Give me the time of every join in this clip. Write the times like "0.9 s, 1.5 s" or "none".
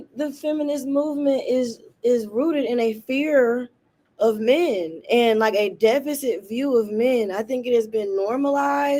none